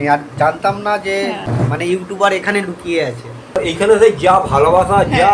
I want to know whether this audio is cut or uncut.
cut